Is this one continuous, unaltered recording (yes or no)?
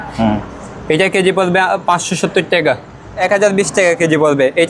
no